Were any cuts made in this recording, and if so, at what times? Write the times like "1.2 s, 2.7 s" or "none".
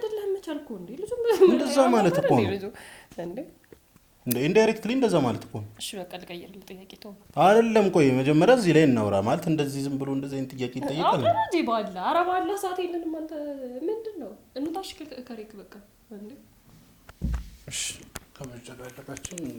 none